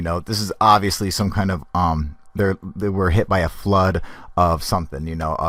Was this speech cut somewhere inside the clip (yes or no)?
no